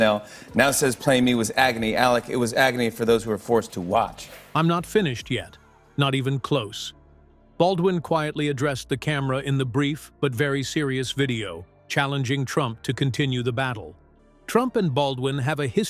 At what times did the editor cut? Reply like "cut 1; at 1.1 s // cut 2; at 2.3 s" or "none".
none